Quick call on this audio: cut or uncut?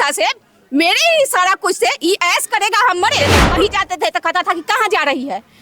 cut